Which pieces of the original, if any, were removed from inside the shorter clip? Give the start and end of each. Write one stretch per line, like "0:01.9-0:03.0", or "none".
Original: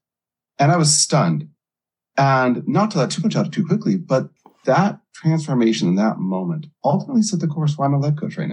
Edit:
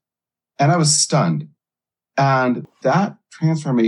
0:02.6-0:04.5